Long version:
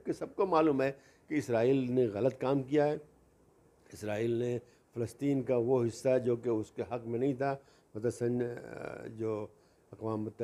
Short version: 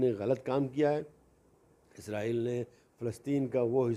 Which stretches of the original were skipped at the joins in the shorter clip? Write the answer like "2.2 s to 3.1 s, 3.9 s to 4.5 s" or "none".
none